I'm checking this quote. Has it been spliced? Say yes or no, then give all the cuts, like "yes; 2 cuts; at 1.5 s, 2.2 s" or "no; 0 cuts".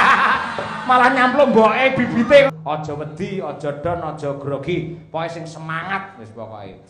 yes; 1 cut; at 2.5 s